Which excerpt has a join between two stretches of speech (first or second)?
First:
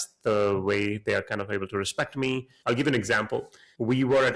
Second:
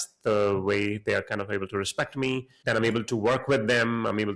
first